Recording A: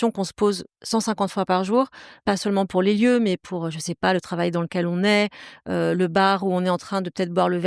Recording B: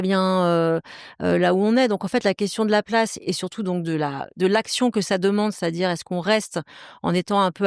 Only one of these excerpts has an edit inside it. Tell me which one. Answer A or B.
A